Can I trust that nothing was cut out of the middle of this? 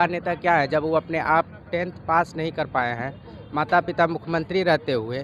yes; 0 cuts

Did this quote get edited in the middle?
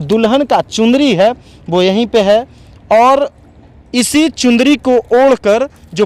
no; 0 cuts

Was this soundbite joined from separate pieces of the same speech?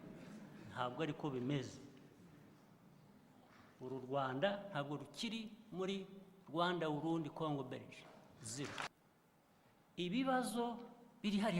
yes; 1 cut; at 8.9 s

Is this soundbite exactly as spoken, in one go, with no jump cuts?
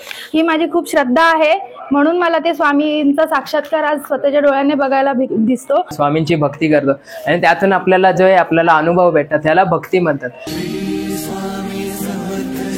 no; 2 cuts; at 6.0 s, 10.4 s

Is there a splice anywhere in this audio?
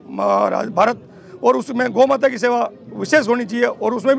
no; 0 cuts

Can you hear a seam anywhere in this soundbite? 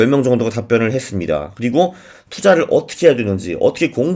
no; 0 cuts

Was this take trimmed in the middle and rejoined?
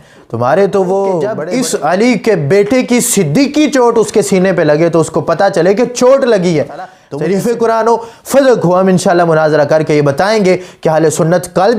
yes; 2 cuts; at 1.4 s, 7.0 s

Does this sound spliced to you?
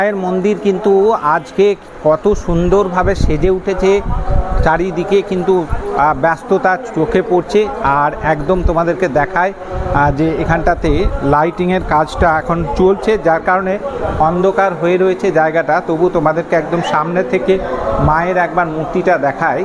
no; 0 cuts

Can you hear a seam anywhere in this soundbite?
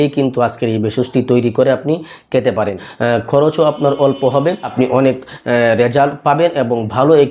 yes; 2 cuts; at 2.9 s, 4.7 s

